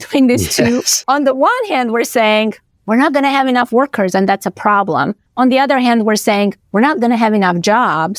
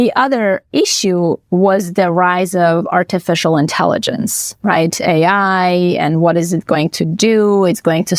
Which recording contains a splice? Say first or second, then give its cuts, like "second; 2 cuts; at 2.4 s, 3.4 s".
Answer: first; 1 cut; at 1.0 s